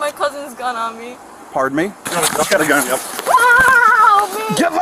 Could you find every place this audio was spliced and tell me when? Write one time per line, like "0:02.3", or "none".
0:02.0